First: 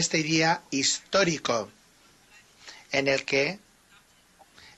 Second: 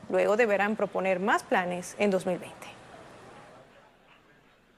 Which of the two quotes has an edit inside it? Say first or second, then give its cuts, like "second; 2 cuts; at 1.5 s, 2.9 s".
second; 1 cut; at 1.4 s